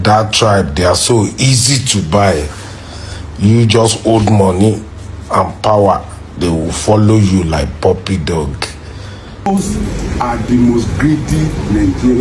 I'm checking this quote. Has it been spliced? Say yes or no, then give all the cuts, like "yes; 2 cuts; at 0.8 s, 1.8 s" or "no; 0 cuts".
yes; 1 cut; at 9.5 s